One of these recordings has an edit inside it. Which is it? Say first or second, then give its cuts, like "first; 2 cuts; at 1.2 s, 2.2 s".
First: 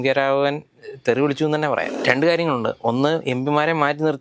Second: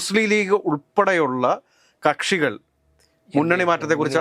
first; 1 cut; at 1.9 s